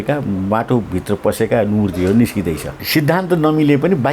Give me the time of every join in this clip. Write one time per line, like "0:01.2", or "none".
0:02.7